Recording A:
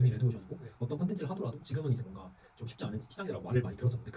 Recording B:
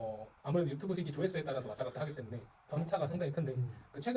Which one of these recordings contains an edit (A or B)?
B